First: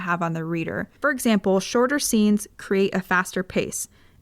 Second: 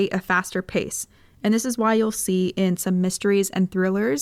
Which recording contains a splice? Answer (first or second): first